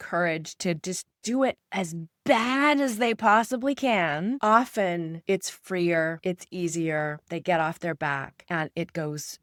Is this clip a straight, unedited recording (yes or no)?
yes